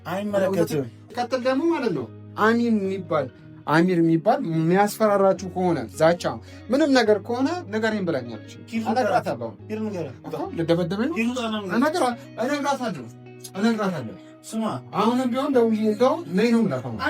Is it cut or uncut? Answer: cut